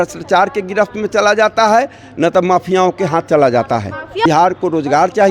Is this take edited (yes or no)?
yes